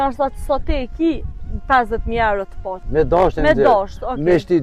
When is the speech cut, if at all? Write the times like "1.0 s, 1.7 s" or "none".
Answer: 2.8 s